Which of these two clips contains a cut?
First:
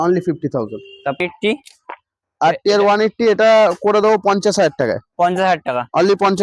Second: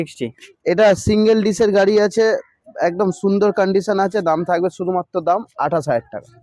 first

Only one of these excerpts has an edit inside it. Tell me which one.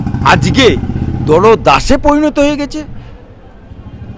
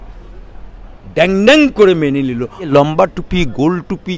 second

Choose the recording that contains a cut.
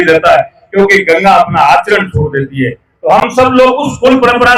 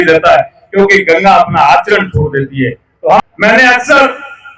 second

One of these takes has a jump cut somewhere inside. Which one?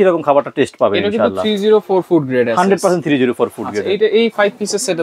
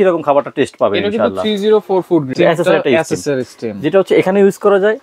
second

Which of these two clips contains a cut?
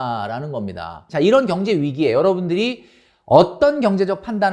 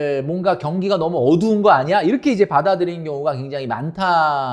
first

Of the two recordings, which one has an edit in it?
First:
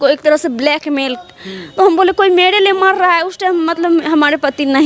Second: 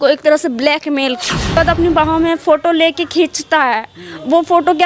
second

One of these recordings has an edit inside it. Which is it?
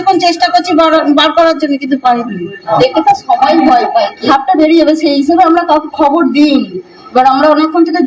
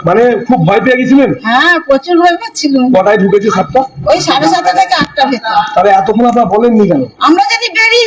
first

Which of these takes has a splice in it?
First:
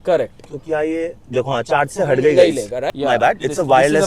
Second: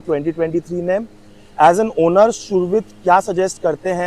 first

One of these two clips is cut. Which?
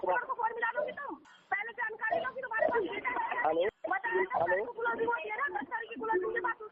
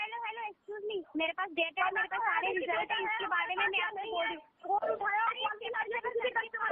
first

